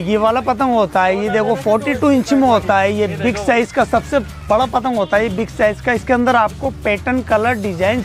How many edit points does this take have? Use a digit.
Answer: 0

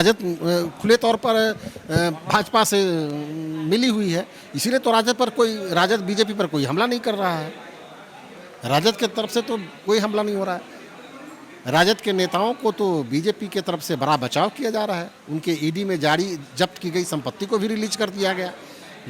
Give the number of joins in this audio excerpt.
0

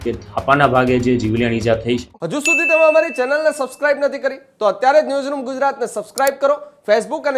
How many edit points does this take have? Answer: 1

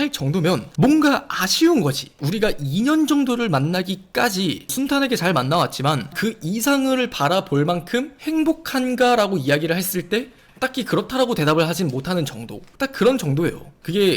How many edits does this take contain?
1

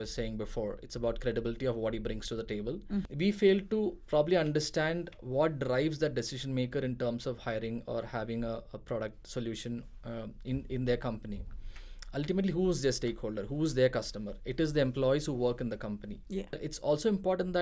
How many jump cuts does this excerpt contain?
2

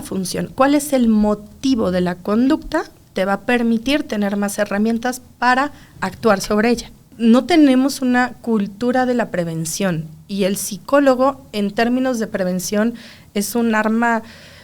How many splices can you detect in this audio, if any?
1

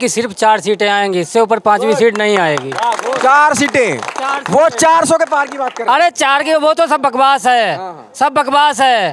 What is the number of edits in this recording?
0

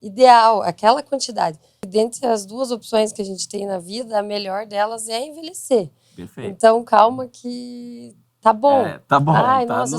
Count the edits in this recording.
1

